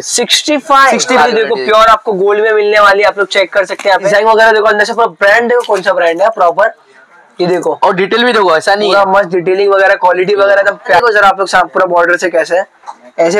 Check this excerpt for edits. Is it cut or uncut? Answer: cut